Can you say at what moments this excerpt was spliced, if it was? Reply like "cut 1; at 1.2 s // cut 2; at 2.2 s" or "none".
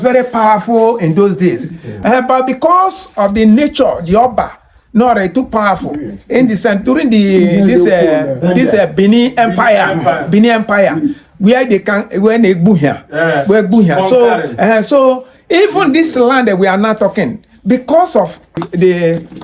cut 1; at 1.9 s // cut 2; at 18.6 s